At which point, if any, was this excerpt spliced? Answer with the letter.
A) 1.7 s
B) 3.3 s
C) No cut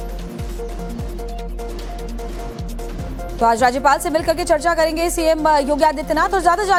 C